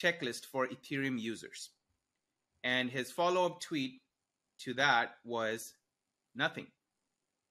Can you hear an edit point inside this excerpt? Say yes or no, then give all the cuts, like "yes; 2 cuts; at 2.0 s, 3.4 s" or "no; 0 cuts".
no; 0 cuts